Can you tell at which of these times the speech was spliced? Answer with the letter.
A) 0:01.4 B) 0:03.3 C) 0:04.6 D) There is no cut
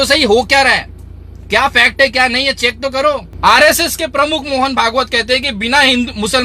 B